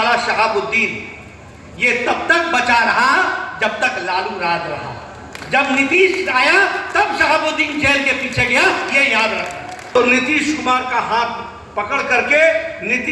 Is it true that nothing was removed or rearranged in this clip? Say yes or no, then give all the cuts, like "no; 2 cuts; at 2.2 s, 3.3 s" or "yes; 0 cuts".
no; 1 cut; at 9.9 s